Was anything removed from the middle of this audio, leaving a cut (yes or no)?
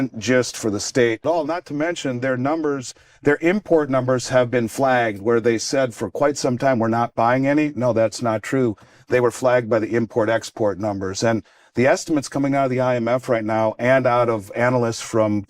yes